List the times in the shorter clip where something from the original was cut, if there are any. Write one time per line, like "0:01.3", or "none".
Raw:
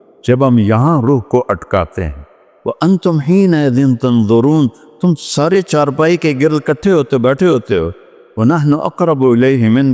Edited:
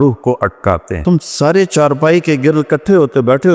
0:00.9